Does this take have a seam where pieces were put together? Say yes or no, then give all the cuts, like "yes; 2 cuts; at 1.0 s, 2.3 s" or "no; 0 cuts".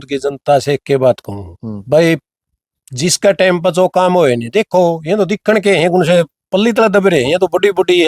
no; 0 cuts